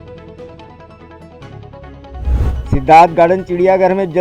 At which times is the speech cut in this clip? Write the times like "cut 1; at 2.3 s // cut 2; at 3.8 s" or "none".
cut 1; at 2.6 s